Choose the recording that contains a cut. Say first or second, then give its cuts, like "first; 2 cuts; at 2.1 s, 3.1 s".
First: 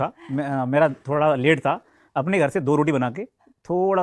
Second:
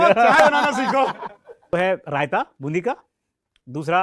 second; 1 cut; at 1.6 s